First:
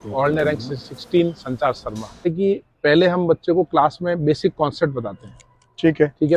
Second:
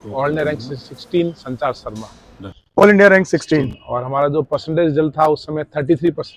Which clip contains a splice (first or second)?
first